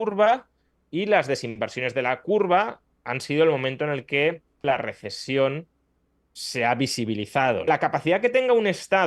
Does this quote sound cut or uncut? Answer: cut